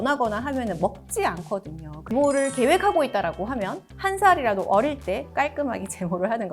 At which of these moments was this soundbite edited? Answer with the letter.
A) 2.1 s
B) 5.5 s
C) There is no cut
A